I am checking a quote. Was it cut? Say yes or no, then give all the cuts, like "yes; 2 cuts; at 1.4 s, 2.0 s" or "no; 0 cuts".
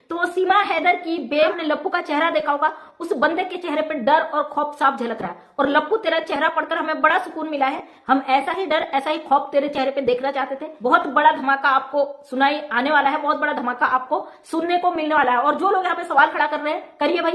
yes; 2 cuts; at 1.6 s, 10.6 s